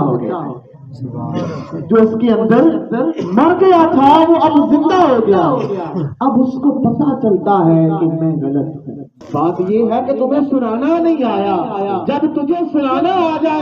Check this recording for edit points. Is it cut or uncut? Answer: cut